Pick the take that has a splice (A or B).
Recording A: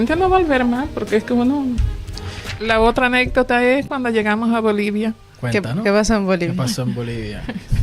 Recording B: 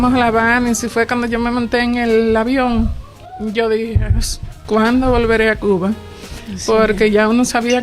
A